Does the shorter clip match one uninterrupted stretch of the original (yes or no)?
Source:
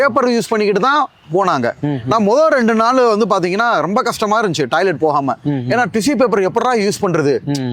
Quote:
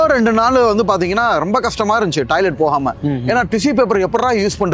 yes